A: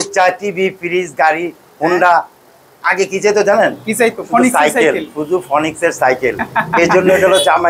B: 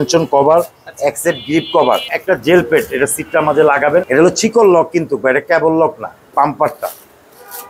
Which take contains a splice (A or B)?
B